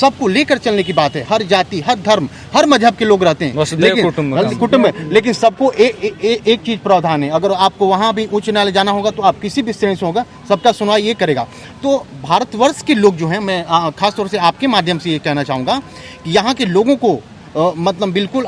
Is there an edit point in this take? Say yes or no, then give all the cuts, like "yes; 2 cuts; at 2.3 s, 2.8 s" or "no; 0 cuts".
no; 0 cuts